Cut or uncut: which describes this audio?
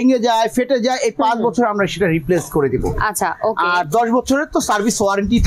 uncut